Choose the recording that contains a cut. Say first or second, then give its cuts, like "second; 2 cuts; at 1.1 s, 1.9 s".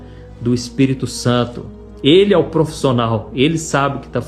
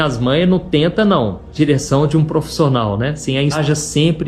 second; 2 cuts; at 1.5 s, 3.6 s